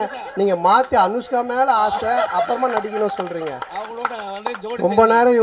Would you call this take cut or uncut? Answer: uncut